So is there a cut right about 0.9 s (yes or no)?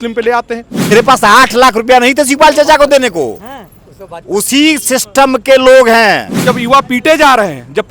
yes